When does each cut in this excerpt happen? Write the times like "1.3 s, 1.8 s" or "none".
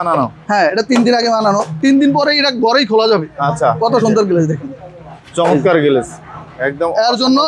none